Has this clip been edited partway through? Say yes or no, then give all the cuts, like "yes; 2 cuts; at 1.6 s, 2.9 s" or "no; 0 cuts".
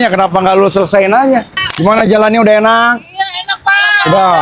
yes; 1 cut; at 1.6 s